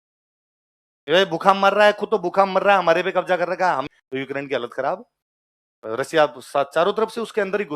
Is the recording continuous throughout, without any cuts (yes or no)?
no